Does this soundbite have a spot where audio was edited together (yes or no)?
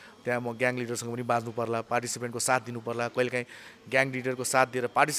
no